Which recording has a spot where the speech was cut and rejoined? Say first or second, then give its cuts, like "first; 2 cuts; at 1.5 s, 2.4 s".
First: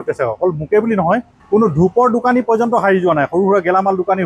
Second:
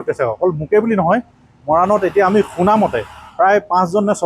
first; 1 cut; at 1.3 s